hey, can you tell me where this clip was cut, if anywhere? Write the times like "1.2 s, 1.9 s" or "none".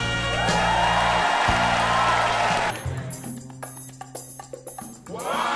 2.7 s